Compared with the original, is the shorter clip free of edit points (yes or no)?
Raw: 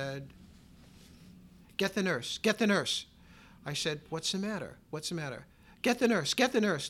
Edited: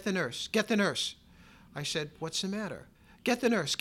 no